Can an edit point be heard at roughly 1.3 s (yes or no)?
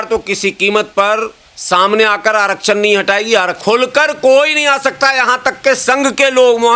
no